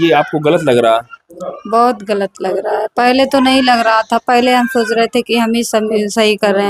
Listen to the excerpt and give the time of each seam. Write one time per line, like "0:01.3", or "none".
none